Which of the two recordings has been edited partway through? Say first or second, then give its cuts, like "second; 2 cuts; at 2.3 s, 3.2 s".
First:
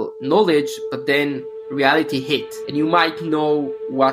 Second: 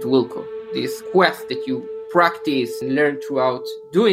second; 2 cuts; at 1.0 s, 2.8 s